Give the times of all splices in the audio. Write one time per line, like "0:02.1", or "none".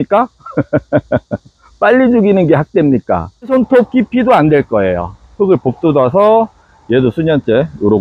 0:03.5